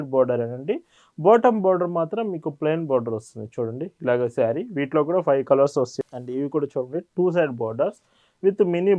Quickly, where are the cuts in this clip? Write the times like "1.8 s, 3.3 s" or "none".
5.9 s